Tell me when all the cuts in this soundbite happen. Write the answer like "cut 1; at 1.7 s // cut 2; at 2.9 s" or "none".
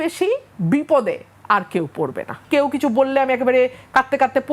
cut 1; at 2.4 s